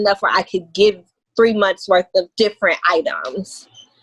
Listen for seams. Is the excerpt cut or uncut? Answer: uncut